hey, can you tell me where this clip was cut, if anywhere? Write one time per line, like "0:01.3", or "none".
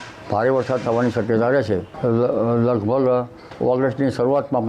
0:01.9